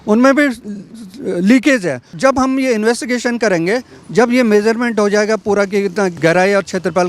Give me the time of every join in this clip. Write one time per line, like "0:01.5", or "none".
0:02.1
0:06.2